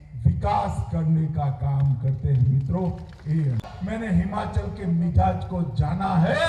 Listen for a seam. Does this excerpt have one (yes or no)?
yes